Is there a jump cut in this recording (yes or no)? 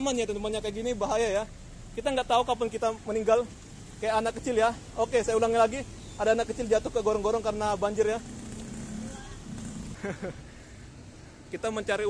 yes